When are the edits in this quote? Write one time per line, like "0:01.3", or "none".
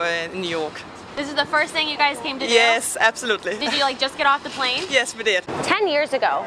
0:05.5